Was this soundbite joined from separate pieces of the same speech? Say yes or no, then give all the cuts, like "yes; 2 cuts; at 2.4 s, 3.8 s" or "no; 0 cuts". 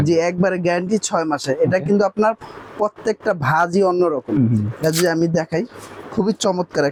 no; 0 cuts